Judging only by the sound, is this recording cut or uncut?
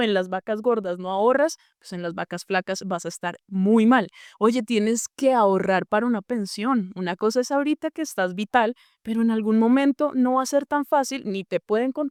uncut